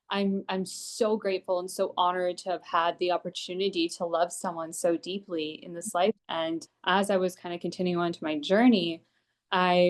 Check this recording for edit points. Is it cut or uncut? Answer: cut